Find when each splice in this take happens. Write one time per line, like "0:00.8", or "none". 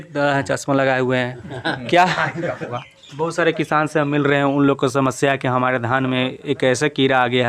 0:02.7